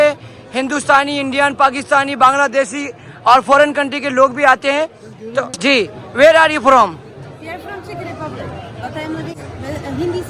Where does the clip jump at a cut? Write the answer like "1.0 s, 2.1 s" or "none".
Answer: 5.5 s, 9.3 s